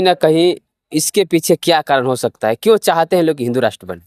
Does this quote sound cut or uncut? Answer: uncut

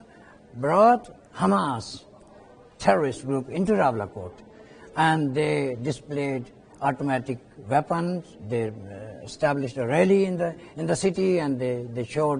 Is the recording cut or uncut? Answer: uncut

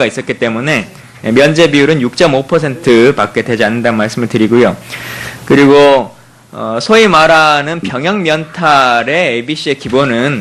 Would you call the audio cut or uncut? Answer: cut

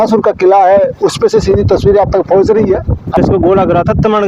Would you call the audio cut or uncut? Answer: cut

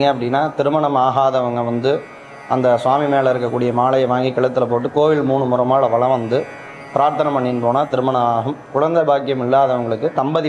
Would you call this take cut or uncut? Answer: uncut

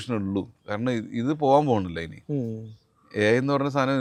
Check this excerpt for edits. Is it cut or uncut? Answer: uncut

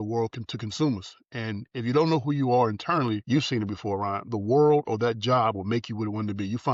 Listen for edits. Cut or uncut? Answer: uncut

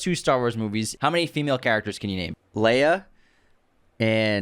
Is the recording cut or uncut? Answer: cut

